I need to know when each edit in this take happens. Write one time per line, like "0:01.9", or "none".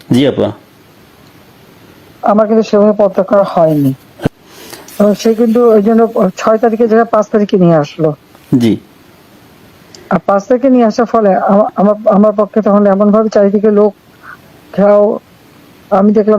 0:04.3